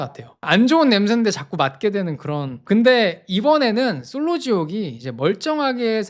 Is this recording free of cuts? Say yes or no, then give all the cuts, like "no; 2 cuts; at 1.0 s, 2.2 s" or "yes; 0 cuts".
yes; 0 cuts